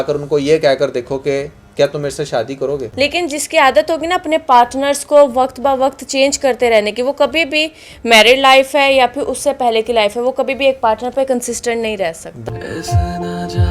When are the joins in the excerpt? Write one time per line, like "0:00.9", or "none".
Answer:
0:02.9
0:12.3